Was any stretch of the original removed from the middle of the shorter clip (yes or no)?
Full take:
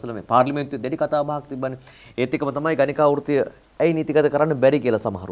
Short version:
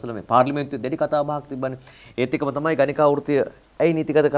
no